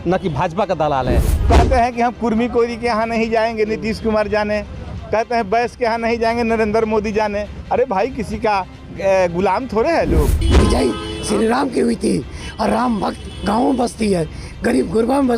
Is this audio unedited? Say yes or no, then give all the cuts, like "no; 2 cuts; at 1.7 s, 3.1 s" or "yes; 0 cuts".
no; 2 cuts; at 1.3 s, 10.4 s